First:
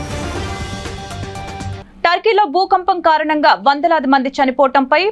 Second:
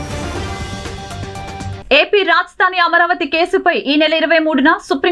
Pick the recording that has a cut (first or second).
first